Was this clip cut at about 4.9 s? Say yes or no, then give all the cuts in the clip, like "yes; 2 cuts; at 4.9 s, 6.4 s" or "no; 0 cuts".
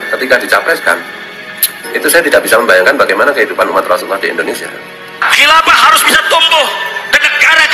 yes; 1 cut; at 4.9 s